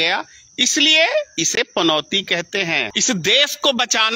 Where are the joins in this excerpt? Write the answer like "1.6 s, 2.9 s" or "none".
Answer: 2.9 s